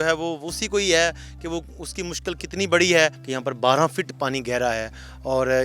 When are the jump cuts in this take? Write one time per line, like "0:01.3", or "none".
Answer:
0:03.2

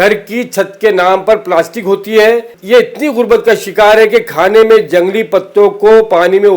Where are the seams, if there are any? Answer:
0:02.5

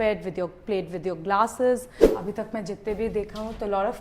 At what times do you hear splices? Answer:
0:02.1

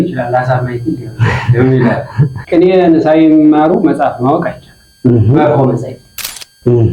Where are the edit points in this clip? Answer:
0:02.3

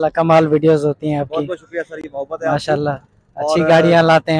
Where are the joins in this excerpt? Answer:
none

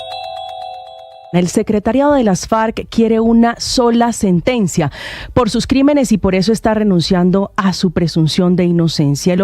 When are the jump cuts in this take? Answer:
0:01.2

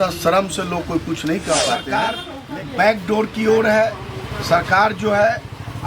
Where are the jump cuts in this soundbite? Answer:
0:01.8

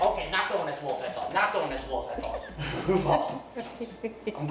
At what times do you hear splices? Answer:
0:02.6

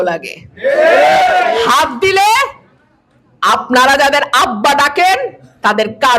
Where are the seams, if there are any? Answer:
none

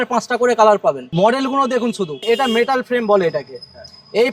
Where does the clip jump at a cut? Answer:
0:01.0
0:02.2

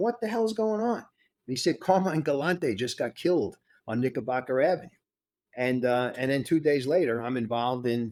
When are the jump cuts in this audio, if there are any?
none

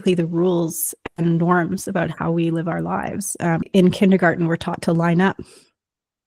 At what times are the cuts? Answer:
0:03.6

